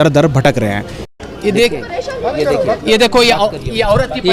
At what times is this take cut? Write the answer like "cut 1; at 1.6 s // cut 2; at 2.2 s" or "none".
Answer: cut 1; at 0.9 s